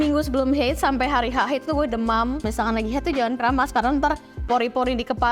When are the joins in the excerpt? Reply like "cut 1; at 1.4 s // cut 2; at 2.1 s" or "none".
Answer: cut 1; at 2.5 s